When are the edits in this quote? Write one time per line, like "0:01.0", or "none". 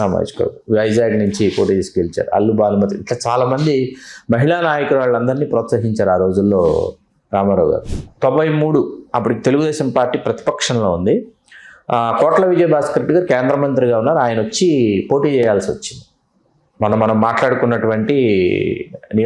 0:07.9